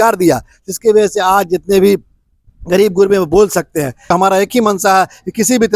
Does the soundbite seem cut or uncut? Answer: cut